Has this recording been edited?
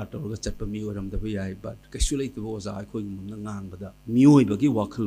yes; 1 cut; at 3.9 s

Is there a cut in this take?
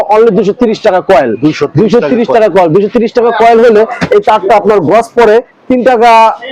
no; 0 cuts

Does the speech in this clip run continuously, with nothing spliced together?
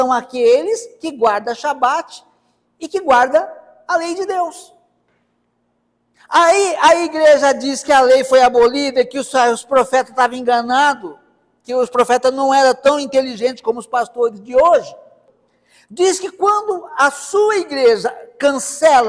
no; 1 cut; at 15.1 s

